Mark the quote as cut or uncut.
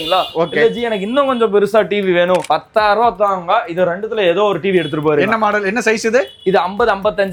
uncut